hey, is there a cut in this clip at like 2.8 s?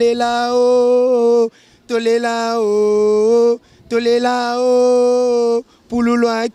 no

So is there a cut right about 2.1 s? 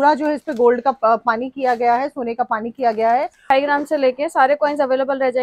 no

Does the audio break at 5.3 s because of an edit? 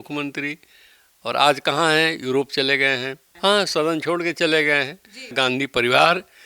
yes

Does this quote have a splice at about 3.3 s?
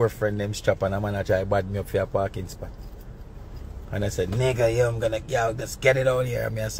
no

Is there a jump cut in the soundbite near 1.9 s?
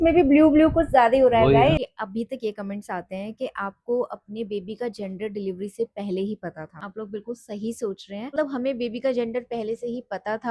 yes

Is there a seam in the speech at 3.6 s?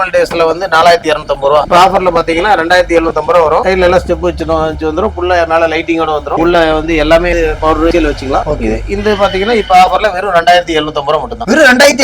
no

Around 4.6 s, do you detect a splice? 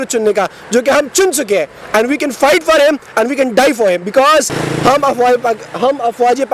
yes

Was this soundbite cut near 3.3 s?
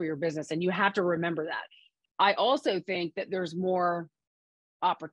no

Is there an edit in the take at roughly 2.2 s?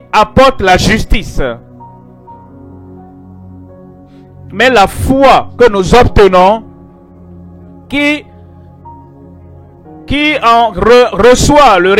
no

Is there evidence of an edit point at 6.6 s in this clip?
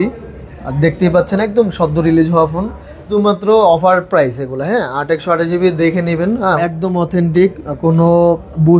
yes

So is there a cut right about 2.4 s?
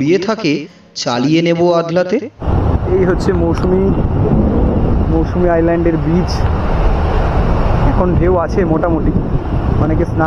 yes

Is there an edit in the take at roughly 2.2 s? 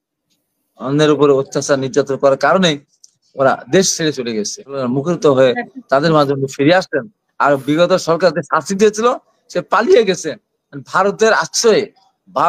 no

